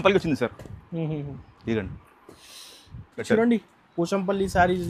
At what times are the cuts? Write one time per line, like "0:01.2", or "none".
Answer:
0:03.3